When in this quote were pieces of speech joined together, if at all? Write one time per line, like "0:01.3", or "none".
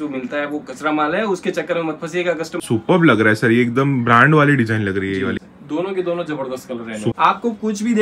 0:02.6
0:05.5
0:07.1